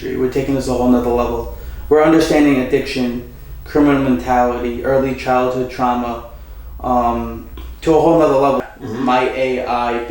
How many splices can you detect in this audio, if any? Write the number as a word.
one